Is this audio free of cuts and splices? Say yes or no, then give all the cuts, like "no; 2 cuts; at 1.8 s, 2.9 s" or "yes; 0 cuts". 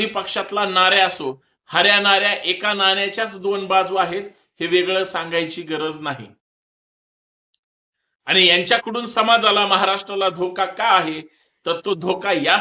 yes; 0 cuts